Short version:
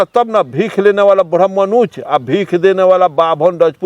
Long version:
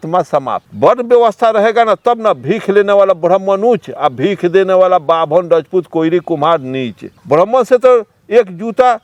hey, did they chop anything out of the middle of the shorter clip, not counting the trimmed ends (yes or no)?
no